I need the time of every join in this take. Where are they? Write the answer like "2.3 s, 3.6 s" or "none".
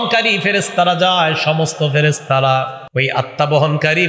2.8 s